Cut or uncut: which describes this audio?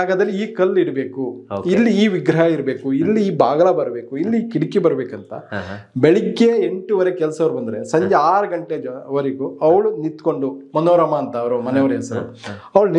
uncut